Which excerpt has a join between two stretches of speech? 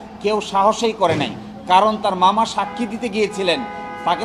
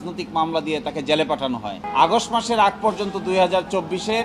second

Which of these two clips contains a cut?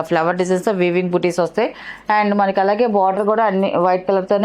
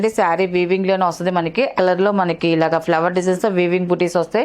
second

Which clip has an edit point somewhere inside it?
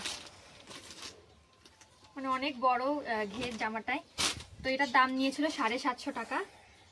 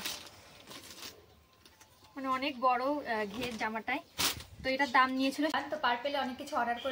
second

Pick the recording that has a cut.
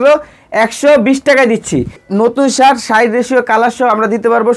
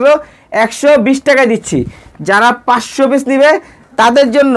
first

